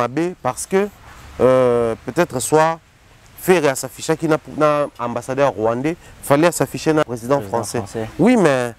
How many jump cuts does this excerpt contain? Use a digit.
1